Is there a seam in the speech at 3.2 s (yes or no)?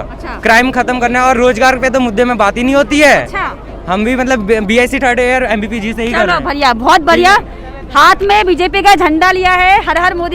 no